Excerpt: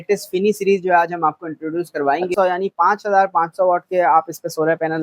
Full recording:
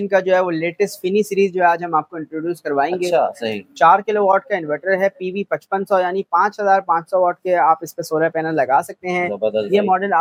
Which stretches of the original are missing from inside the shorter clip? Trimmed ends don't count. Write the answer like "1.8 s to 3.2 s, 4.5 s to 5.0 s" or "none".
3.0 s to 5.9 s